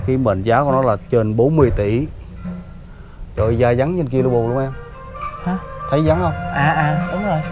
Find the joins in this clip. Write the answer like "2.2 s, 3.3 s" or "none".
none